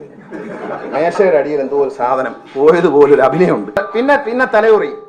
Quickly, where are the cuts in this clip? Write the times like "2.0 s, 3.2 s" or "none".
3.8 s